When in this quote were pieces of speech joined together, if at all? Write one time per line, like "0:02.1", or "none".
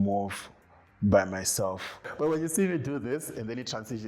0:02.0